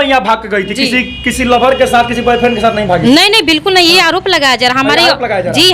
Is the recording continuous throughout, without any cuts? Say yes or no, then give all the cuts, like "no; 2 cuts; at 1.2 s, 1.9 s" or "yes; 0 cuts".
yes; 0 cuts